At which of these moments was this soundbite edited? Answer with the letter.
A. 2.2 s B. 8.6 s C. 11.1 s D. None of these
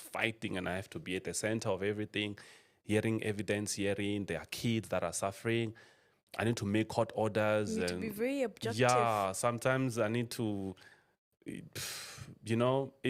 D